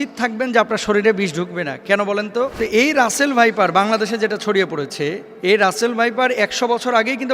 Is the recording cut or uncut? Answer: cut